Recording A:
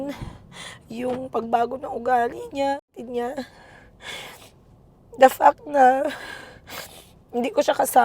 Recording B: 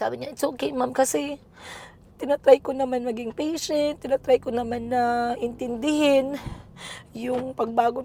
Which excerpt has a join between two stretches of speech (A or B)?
A